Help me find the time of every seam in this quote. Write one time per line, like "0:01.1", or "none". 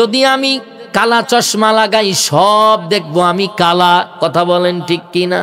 none